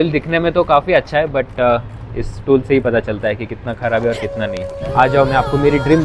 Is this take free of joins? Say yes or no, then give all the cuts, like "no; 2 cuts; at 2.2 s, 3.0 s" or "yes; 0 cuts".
no; 1 cut; at 4.9 s